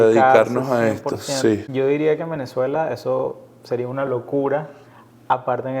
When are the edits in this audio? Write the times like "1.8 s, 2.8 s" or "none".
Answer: 1.7 s